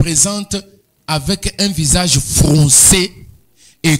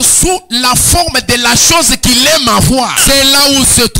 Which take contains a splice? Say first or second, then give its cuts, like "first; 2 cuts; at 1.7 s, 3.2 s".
second; 1 cut; at 3.0 s